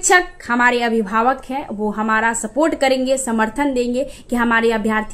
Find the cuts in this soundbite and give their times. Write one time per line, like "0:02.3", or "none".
none